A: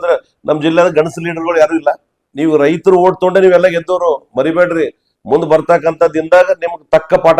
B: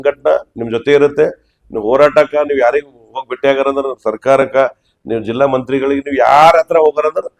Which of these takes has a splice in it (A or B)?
A